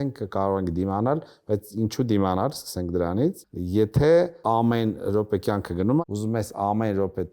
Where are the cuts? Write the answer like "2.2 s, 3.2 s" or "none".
3.5 s, 4.4 s, 6.0 s